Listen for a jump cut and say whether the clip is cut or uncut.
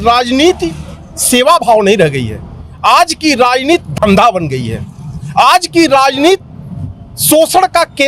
uncut